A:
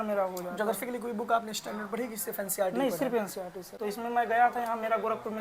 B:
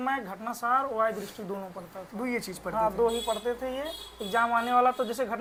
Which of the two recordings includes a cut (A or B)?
A